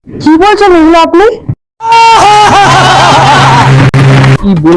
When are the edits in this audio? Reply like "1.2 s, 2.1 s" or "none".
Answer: none